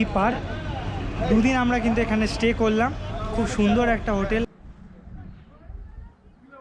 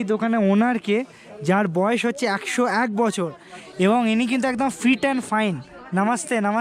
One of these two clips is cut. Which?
first; 1 cut; at 4.5 s

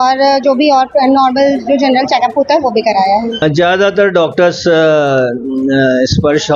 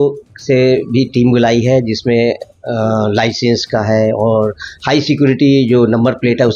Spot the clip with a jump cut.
first; 1 cut; at 3.4 s

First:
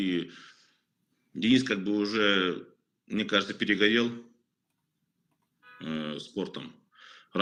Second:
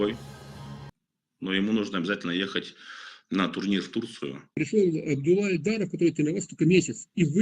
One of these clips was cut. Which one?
second; 1 cut; at 4.5 s

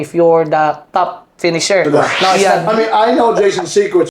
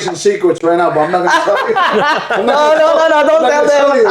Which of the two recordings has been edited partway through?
first; 1 cut; at 2.4 s

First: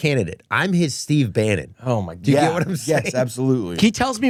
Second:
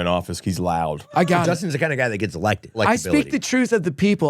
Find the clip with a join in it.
second; 2 cuts; at 1.0 s, 2.8 s

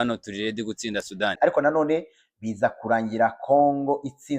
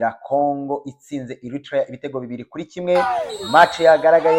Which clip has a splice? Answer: first; 1 cut; at 1.4 s

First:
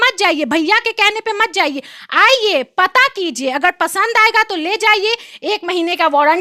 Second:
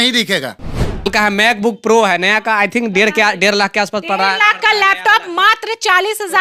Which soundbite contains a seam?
second; 1 cut; at 1.1 s

